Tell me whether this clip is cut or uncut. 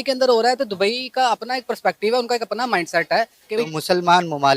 cut